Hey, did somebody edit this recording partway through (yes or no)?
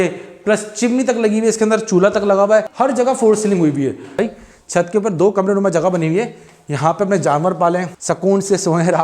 yes